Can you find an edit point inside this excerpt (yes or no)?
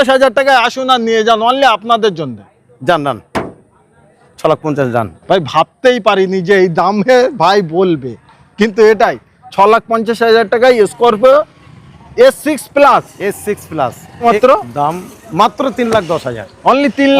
yes